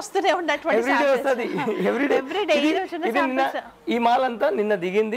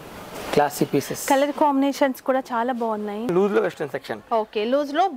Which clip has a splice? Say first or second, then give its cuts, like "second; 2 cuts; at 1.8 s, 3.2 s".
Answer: second; 1 cut; at 3.3 s